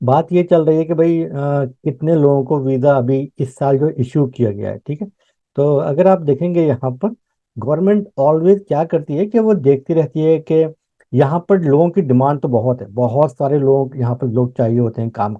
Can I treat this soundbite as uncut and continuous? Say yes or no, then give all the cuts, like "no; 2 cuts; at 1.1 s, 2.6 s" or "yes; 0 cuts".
no; 1 cut; at 7.4 s